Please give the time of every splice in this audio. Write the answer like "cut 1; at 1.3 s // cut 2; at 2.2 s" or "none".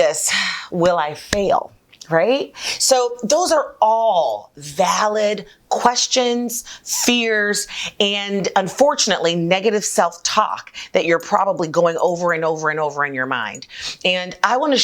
cut 1; at 1.8 s